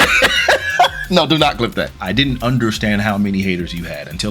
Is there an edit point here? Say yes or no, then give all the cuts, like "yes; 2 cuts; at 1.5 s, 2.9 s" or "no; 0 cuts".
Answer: yes; 1 cut; at 2.0 s